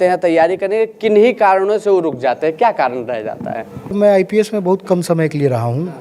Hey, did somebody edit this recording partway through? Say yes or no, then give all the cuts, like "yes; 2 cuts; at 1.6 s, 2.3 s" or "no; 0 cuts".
yes; 1 cut; at 3.9 s